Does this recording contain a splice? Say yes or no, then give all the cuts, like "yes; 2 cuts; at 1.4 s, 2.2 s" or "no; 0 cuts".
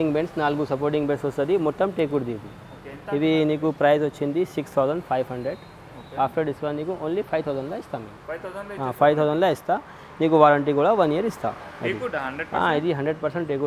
no; 0 cuts